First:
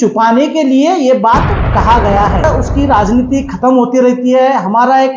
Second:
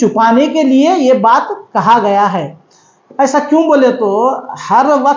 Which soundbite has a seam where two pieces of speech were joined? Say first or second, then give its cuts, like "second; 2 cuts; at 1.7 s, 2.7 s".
first; 1 cut; at 2.4 s